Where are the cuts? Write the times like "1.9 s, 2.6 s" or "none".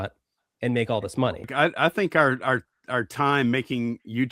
1.5 s